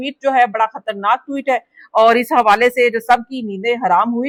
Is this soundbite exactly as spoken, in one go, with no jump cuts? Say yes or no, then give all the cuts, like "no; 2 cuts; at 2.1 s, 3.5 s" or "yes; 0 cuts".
yes; 0 cuts